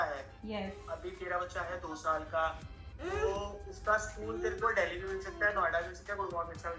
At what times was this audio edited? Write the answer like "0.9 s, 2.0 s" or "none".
none